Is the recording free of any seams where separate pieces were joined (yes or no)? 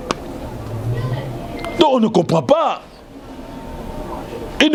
yes